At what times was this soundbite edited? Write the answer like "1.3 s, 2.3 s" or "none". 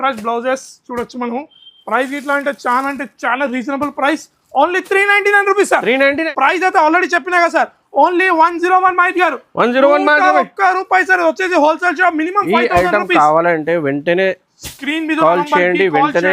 6.2 s